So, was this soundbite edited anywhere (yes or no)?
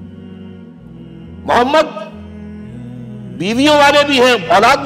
no